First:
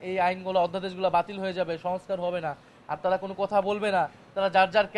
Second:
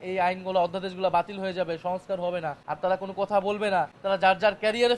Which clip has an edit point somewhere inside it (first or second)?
second